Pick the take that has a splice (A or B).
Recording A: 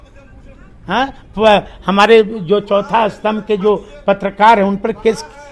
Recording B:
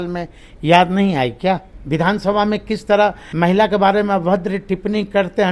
B